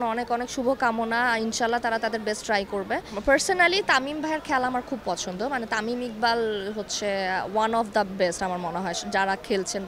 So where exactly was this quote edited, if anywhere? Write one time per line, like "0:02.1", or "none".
0:03.1

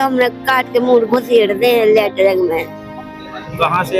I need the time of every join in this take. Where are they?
none

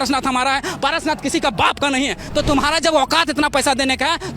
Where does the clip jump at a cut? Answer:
0:02.2

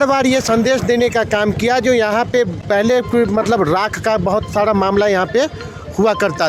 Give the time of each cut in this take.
none

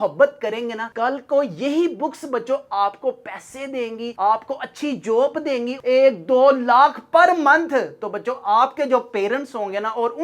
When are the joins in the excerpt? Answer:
0:05.8

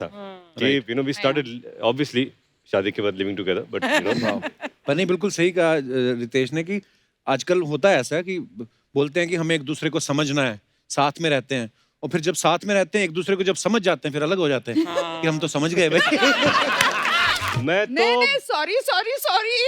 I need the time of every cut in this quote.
0:17.4

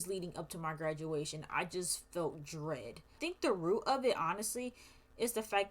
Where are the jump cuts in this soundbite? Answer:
0:03.2

